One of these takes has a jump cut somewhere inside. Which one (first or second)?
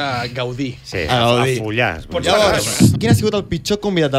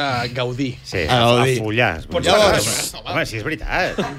first